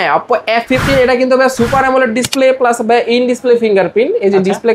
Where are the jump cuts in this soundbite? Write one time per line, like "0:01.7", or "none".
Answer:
none